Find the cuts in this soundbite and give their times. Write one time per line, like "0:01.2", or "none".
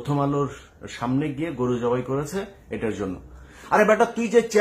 0:03.5